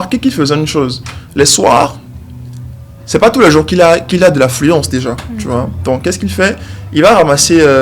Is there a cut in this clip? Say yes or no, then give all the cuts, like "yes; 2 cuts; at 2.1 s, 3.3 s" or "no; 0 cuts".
no; 0 cuts